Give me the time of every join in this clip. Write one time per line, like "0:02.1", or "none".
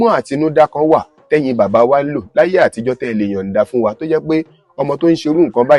none